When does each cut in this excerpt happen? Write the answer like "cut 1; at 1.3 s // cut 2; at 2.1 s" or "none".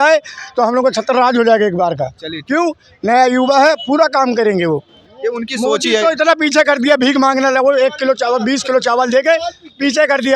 none